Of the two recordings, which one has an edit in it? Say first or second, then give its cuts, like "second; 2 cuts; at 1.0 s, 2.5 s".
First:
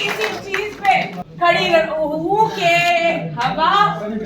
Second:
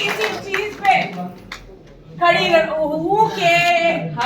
first; 1 cut; at 1.2 s